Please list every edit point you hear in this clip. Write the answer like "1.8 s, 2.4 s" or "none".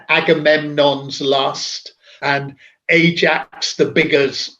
2.2 s